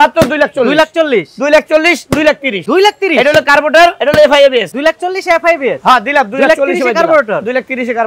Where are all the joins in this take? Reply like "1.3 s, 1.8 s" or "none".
2.5 s, 4.0 s, 4.7 s